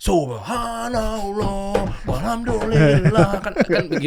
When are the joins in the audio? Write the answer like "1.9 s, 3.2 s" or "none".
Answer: none

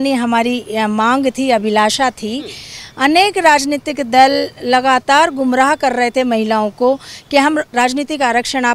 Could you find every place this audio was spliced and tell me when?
7.7 s

